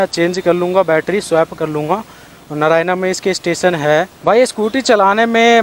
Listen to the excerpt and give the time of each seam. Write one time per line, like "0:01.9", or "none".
0:04.1

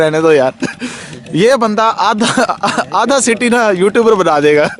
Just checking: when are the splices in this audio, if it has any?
none

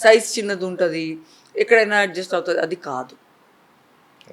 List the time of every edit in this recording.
none

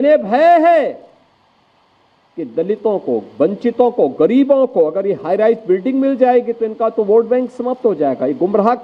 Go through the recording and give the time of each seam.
none

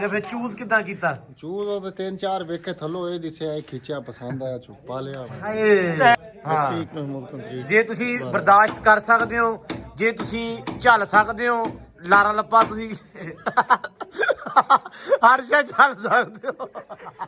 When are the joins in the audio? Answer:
0:06.1

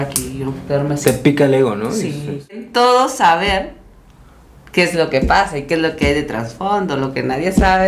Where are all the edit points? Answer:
0:02.6

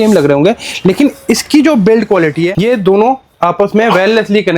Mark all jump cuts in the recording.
0:02.6

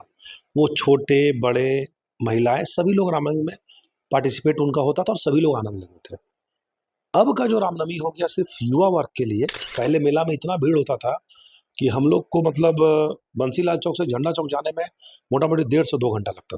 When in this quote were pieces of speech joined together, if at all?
0:09.6

